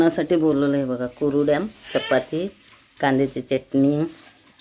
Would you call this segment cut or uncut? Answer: uncut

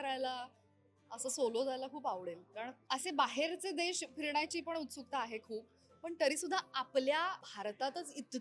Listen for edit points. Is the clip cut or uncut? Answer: cut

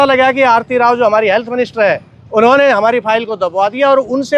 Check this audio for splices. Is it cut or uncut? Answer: uncut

